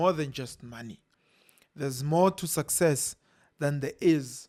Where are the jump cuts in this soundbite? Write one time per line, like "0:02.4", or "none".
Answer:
none